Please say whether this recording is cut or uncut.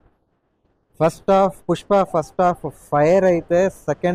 uncut